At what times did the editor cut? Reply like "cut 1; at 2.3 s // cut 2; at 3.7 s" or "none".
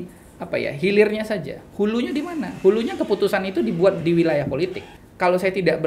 cut 1; at 4.9 s